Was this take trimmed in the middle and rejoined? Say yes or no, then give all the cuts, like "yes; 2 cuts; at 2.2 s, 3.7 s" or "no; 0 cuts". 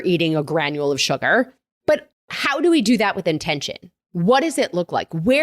yes; 1 cut; at 2.2 s